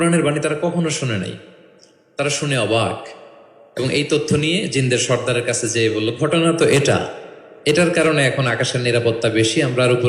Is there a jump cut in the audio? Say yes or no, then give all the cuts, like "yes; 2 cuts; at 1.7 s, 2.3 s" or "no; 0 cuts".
no; 0 cuts